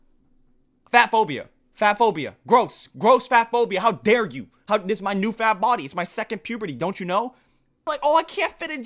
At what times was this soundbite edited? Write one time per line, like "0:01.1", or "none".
0:07.8

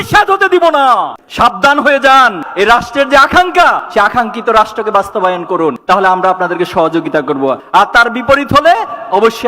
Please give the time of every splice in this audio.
0:01.2
0:02.4

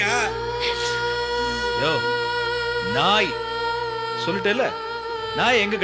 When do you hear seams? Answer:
none

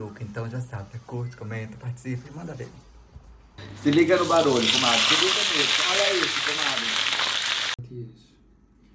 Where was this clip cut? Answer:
0:03.6
0:07.7

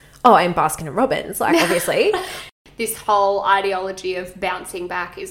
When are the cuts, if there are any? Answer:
0:02.5

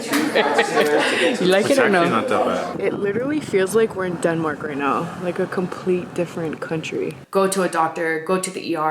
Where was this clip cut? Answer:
0:02.7
0:07.2

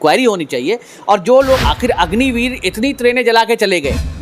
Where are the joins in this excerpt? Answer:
0:01.6

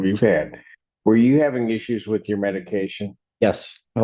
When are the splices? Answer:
none

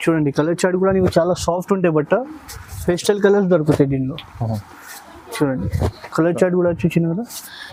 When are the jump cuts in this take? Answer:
none

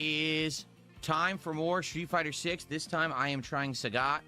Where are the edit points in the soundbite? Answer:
none

